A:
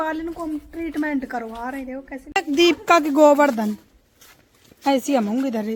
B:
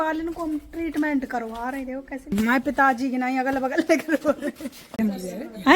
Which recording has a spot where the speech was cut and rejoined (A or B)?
B